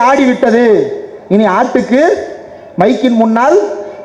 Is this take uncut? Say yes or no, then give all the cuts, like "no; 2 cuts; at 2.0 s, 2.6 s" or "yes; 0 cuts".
yes; 0 cuts